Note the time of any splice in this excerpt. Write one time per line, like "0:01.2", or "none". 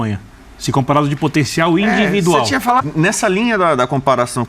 0:02.8